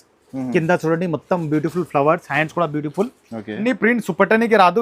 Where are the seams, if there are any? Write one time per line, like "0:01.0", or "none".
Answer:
0:03.5